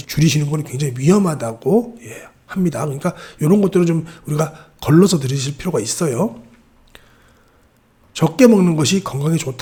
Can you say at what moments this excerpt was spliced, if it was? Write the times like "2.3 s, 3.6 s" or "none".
none